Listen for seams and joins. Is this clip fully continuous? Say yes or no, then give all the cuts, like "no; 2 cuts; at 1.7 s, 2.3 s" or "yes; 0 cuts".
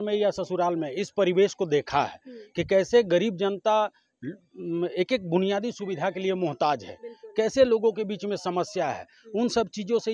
yes; 0 cuts